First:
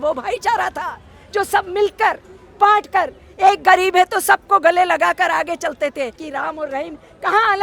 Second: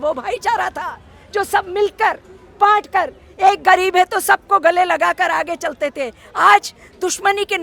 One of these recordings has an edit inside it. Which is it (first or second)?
first